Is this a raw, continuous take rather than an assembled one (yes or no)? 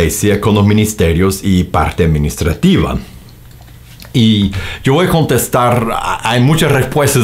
yes